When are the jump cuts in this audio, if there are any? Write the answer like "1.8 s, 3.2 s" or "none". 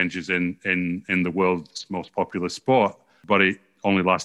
3.2 s